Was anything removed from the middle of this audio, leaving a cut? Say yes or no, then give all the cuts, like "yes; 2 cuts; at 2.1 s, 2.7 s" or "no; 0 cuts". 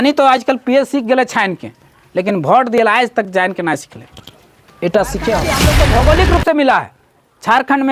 yes; 1 cut; at 5.7 s